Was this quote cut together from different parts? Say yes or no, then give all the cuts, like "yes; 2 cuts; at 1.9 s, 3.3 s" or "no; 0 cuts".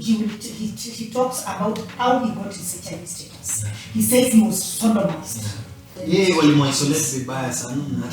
yes; 1 cut; at 5.9 s